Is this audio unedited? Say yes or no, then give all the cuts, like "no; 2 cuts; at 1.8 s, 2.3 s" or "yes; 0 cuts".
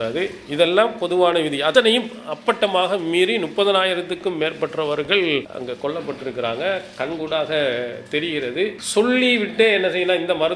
no; 3 cuts; at 1.7 s, 5.5 s, 8.8 s